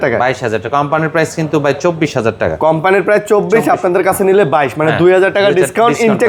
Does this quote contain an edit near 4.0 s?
no; 0 cuts

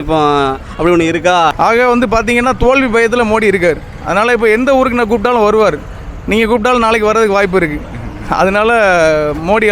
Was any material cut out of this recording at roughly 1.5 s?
yes; 1 cut; at 1.5 s

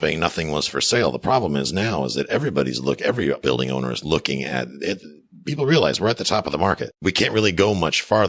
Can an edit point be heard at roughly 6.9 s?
yes; 2 cuts; at 3.4 s, 6.9 s

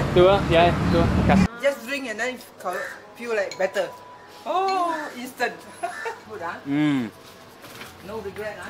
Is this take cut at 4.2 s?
no; 2 cuts; at 1.6 s, 6.2 s

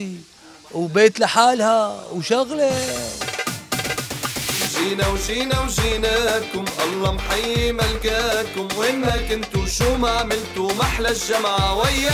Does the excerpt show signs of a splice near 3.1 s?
yes; 1 cut; at 3.1 s

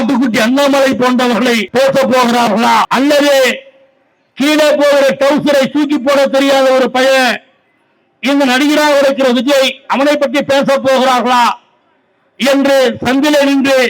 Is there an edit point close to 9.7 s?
no; 2 cuts; at 1.6 s, 2.9 s

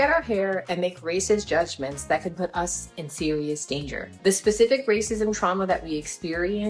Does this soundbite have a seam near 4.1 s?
yes; 1 cut; at 4.1 s

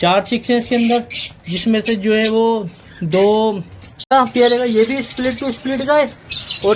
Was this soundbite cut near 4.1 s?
yes; 1 cut; at 4.1 s

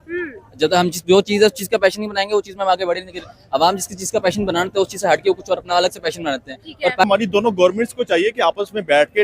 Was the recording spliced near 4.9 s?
no; 1 cut; at 7.0 s

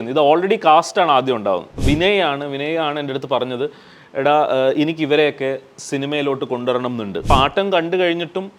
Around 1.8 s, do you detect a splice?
yes; 2 cuts; at 1.8 s, 7.3 s

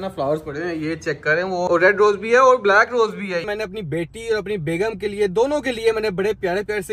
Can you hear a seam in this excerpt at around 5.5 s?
no; 2 cuts; at 1.7 s, 3.5 s

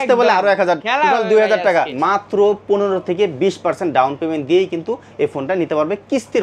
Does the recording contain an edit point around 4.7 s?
no; 1 cut; at 1.9 s

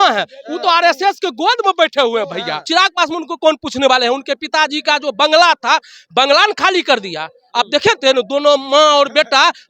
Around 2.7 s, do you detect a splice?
yes; 1 cut; at 2.7 s

